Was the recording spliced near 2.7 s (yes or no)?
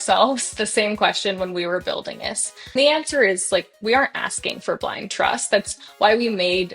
yes